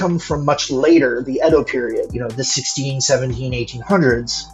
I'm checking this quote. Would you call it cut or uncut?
uncut